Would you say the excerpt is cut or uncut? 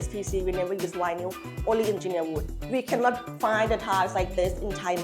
cut